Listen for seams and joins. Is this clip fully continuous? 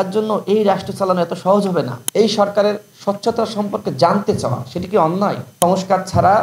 no; 2 cuts; at 2.0 s, 5.4 s

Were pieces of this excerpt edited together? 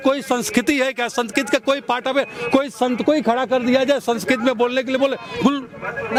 no; 0 cuts

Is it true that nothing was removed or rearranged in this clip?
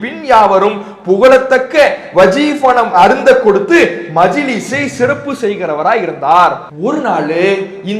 no; 1 cut; at 6.7 s

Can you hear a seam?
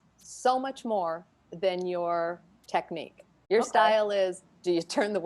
yes; 1 cut; at 3.3 s

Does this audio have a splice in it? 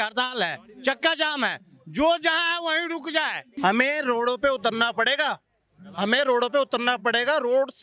yes; 1 cut; at 3.5 s

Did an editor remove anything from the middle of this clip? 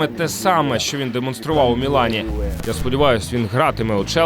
yes; 1 cut; at 2.4 s

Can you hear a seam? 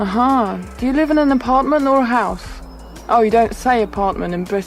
no; 0 cuts

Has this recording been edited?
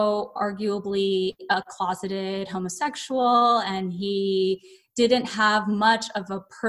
no; 0 cuts

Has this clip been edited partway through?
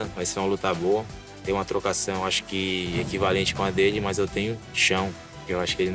yes; 2 cuts; at 1.3 s, 4.7 s

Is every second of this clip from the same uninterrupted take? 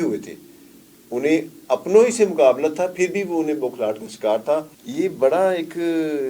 no; 1 cut; at 4.8 s

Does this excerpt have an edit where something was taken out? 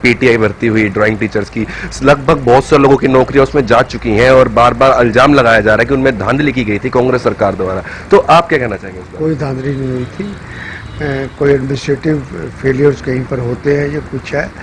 no; 0 cuts

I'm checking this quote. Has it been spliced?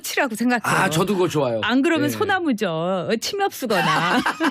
no; 0 cuts

